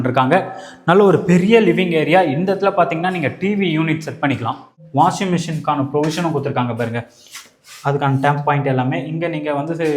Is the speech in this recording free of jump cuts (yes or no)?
no